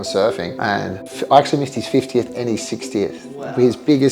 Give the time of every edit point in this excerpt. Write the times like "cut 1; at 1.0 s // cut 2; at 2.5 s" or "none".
cut 1; at 1.0 s